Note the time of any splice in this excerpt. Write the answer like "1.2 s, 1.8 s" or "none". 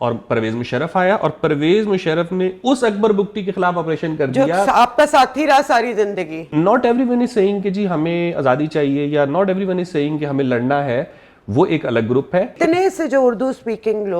6.5 s, 12.5 s